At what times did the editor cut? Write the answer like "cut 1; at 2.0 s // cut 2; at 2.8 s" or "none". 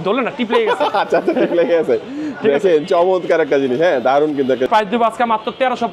cut 1; at 4.7 s